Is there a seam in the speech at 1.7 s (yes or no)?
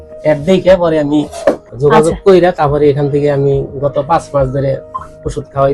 yes